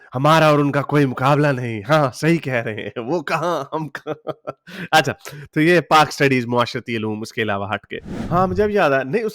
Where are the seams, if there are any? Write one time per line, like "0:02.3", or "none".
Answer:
0:08.0